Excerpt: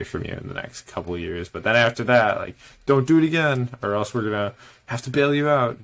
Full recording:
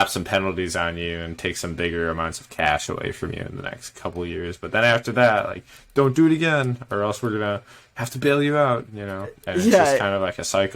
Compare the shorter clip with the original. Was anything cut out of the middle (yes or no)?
no